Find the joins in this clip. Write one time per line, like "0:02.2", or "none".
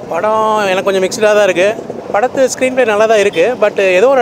0:01.9